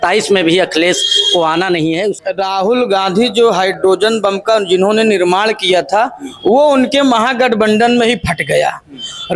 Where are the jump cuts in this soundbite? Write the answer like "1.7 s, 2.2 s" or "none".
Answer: 2.2 s